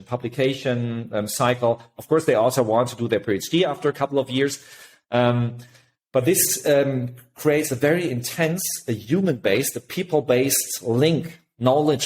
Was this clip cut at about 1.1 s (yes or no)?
no